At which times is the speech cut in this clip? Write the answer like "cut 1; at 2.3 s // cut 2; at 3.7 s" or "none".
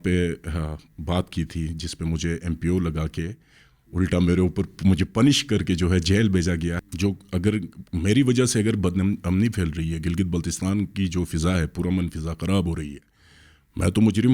cut 1; at 6.8 s